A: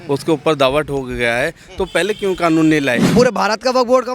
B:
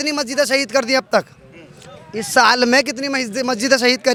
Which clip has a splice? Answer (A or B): A